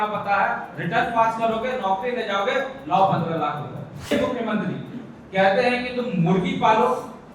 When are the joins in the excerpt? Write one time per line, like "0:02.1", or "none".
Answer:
0:04.1